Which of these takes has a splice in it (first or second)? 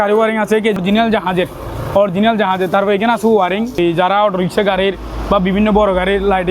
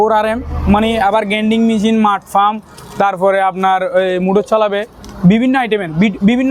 first